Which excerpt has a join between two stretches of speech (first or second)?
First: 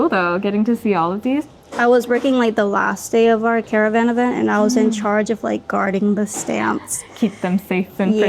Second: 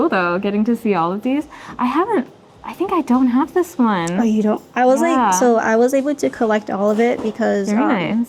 first